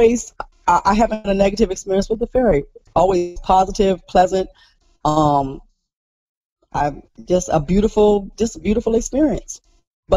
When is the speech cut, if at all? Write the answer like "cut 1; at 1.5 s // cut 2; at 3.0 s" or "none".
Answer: none